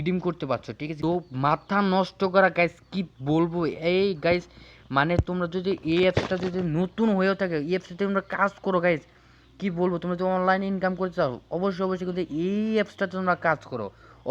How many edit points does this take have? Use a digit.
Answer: 1